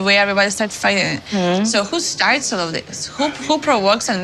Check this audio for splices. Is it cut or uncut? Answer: uncut